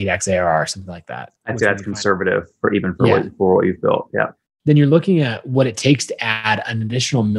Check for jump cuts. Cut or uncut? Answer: cut